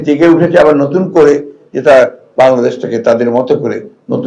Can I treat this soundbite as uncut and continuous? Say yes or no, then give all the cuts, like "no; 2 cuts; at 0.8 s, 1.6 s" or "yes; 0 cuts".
yes; 0 cuts